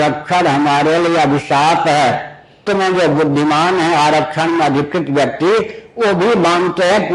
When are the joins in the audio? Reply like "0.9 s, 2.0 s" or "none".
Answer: 2.6 s